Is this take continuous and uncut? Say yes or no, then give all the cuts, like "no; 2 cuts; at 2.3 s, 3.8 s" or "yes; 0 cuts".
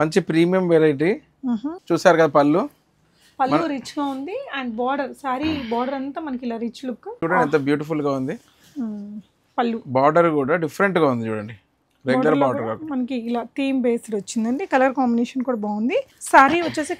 no; 3 cuts; at 1.7 s, 7.2 s, 16.2 s